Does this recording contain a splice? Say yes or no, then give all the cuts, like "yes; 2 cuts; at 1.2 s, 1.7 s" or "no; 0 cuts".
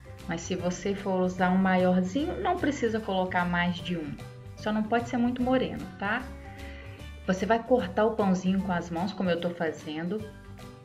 no; 0 cuts